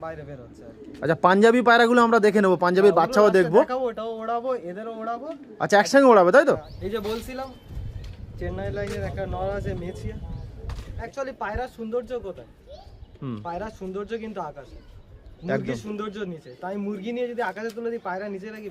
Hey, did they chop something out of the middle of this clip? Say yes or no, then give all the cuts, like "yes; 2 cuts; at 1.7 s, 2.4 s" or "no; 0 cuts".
yes; 2 cuts; at 6.7 s, 10.9 s